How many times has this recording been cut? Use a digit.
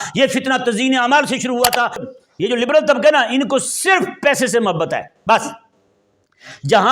1